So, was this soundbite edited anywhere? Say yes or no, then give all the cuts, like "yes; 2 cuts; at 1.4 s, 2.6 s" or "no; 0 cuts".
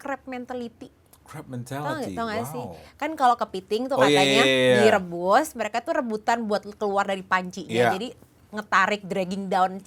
no; 0 cuts